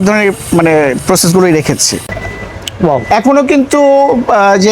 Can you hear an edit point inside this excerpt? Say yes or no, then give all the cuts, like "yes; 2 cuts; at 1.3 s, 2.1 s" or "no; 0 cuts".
yes; 1 cut; at 2.0 s